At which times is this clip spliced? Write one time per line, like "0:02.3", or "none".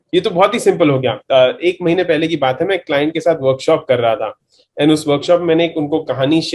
0:01.2